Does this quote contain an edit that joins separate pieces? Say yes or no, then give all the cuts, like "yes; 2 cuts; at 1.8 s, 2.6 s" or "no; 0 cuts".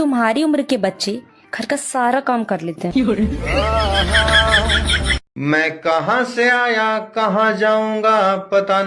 yes; 1 cut; at 5.2 s